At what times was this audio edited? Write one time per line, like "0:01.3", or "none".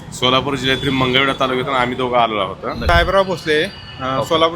0:02.8